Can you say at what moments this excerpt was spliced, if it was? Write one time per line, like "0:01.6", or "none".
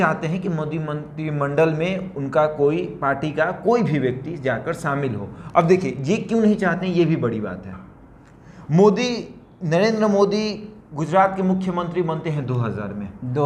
none